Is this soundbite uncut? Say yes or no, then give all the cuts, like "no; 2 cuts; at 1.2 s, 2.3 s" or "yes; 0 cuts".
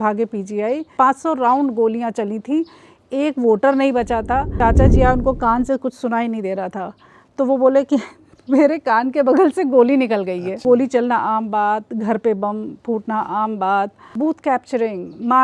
no; 4 cuts; at 0.9 s, 4.6 s, 10.5 s, 14.0 s